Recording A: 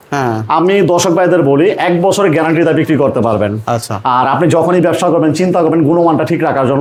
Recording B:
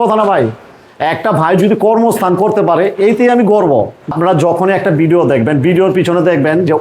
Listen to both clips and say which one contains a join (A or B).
B